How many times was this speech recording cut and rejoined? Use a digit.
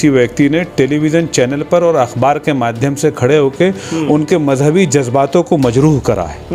0